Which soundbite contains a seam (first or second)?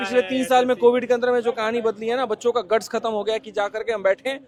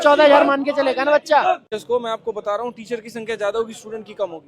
second